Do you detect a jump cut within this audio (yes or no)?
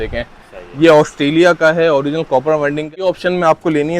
yes